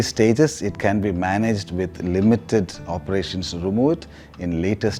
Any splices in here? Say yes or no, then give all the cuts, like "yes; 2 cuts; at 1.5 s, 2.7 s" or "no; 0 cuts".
no; 0 cuts